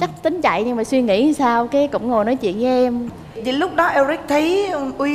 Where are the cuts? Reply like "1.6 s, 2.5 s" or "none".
3.1 s